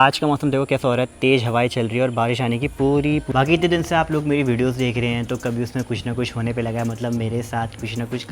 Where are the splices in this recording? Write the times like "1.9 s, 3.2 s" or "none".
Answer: 3.3 s